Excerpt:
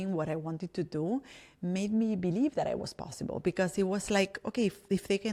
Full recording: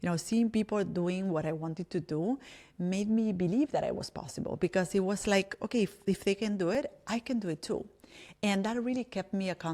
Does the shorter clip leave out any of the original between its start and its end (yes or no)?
no